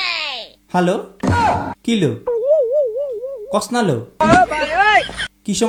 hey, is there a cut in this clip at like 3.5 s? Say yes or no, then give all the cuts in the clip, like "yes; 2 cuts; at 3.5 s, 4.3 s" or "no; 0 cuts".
no; 0 cuts